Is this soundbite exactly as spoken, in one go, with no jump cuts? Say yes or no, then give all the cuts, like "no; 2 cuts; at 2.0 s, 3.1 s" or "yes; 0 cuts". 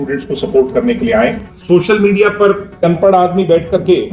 no; 2 cuts; at 1.5 s, 2.8 s